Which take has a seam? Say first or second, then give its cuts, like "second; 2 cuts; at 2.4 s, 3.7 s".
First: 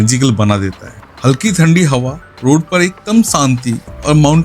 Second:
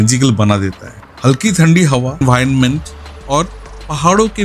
second; 1 cut; at 2.2 s